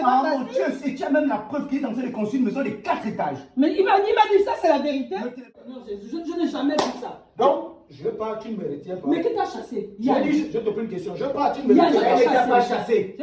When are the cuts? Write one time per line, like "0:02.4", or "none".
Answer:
0:05.6